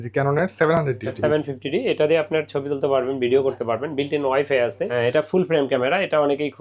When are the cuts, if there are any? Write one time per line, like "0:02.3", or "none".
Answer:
0:01.1
0:04.8

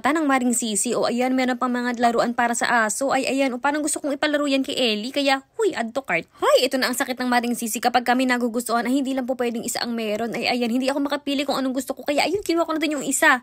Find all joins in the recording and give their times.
none

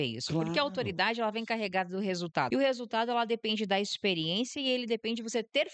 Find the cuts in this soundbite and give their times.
0:02.5

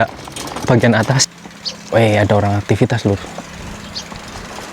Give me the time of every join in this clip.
0:01.3

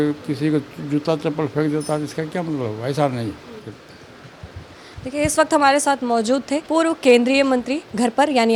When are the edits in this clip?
none

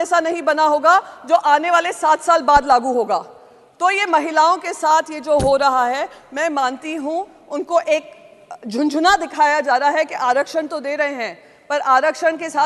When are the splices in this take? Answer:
none

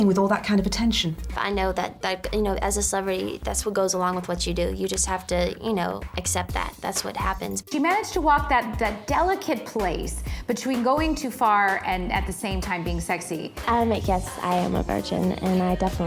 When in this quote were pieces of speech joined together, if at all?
0:01.3
0:07.7
0:13.5

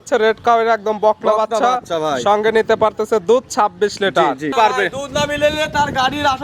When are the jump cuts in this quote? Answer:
0:04.5

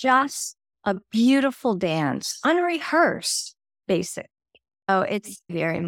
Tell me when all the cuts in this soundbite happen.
0:04.9

